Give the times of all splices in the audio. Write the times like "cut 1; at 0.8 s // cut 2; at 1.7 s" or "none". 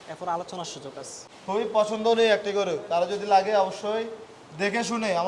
cut 1; at 1.2 s